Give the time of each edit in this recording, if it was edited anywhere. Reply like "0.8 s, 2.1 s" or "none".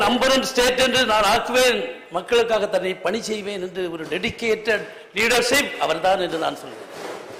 none